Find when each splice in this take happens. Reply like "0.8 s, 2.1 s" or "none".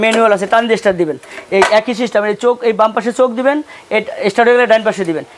none